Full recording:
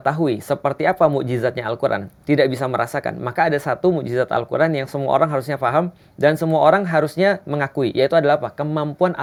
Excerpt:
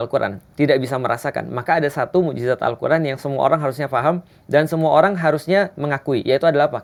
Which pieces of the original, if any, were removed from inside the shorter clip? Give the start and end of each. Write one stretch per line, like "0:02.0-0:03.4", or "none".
none